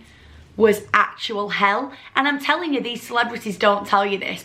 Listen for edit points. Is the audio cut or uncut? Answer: uncut